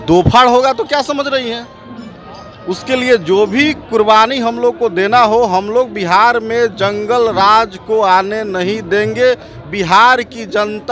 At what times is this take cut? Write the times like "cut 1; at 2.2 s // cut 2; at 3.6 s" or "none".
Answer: none